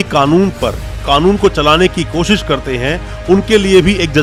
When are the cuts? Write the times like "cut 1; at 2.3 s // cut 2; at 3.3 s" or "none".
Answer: none